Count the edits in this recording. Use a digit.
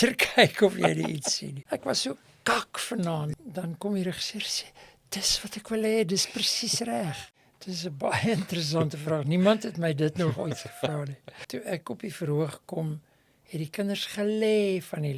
4